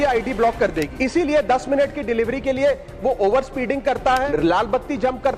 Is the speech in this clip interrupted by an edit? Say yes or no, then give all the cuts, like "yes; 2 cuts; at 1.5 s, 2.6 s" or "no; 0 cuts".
yes; 2 cuts; at 0.9 s, 4.2 s